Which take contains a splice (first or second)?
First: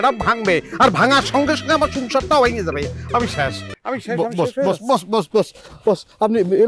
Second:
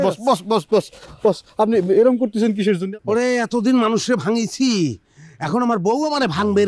first